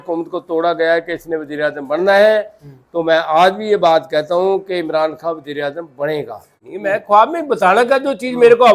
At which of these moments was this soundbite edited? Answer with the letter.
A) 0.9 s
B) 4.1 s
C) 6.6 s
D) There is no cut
C